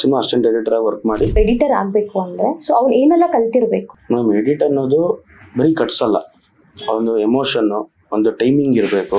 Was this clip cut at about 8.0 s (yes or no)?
no